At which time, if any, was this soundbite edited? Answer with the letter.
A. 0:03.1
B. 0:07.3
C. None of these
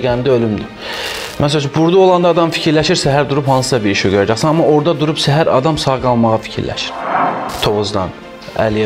B